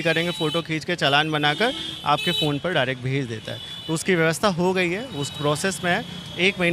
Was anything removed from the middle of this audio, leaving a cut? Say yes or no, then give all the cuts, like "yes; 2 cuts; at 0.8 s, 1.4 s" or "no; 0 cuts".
no; 0 cuts